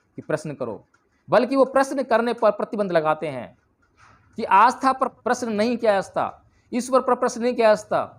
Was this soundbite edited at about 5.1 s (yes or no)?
yes